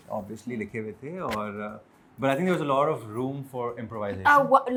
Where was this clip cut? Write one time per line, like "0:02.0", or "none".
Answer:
none